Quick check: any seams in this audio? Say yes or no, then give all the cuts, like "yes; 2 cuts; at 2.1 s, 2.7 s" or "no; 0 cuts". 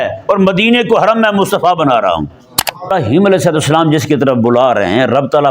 yes; 1 cut; at 2.9 s